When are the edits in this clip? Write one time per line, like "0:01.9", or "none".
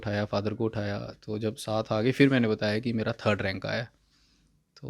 none